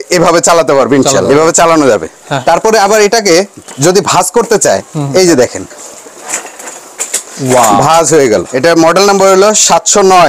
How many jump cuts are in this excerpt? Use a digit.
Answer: 3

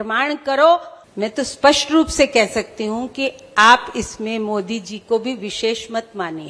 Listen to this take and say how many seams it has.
1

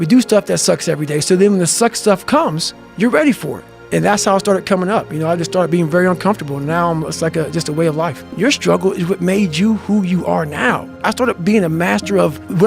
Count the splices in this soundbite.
2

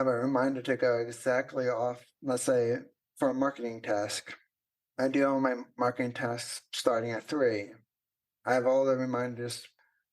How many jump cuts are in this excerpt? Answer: 1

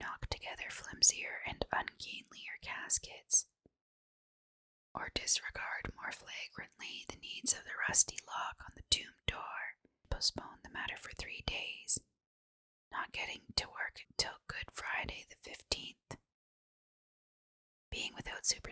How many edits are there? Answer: 1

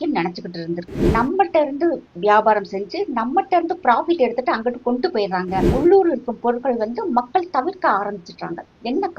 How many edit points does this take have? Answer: 2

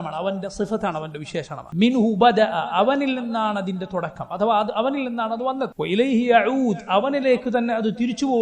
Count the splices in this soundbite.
2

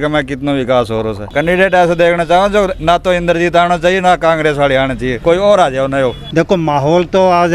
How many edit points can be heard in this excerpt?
3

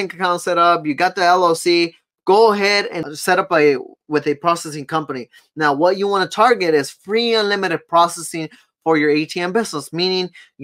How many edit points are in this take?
1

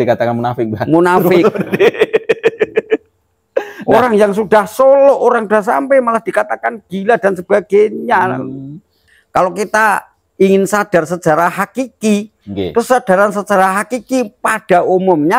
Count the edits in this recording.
1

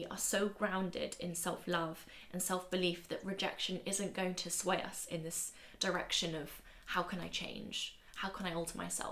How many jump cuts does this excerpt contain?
0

